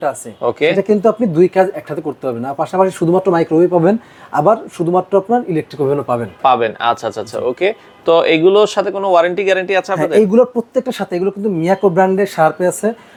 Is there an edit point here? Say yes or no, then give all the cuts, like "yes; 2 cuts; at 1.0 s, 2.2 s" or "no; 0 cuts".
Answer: no; 0 cuts